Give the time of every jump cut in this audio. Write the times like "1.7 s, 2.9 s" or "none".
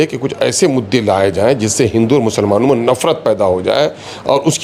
none